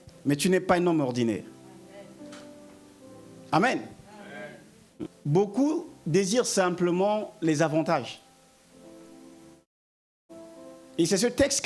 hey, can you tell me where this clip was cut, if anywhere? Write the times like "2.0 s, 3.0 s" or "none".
5.2 s